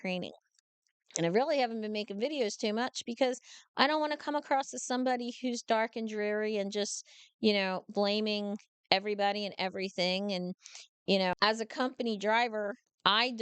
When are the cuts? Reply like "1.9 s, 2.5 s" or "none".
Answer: 11.3 s